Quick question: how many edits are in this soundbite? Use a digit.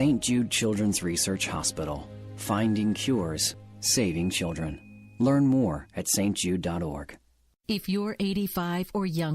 1